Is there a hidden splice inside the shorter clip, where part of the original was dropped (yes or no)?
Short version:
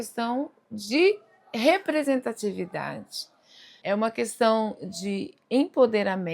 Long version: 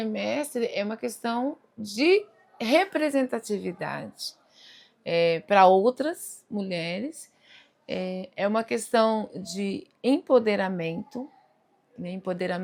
yes